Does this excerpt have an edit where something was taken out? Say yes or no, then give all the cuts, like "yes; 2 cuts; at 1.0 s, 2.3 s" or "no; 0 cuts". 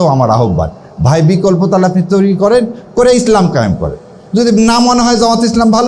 no; 0 cuts